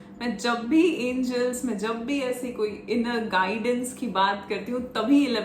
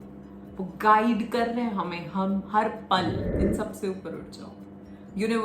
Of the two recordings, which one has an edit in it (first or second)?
second